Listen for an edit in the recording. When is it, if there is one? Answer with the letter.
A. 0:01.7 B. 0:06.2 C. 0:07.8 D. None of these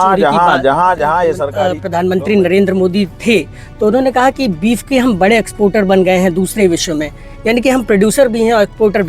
A